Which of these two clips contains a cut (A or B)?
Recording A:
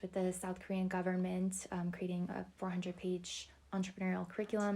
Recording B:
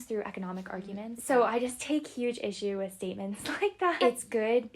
B